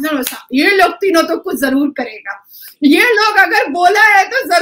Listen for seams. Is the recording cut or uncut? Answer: uncut